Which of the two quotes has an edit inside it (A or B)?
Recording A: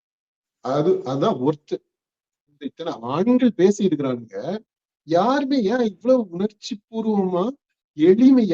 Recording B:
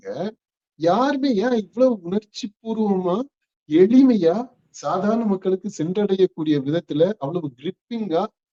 A